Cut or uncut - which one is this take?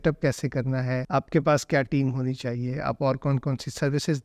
cut